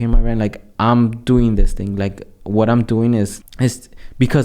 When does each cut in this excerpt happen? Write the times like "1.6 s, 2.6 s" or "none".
3.4 s